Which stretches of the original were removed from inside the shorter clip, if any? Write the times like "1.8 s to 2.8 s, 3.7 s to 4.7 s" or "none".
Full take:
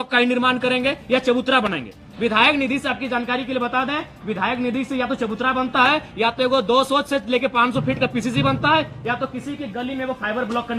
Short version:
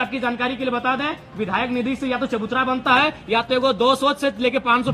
none